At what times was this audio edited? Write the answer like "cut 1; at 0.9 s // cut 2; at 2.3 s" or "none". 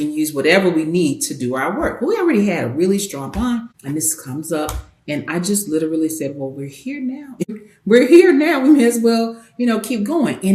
cut 1; at 3.8 s // cut 2; at 7.6 s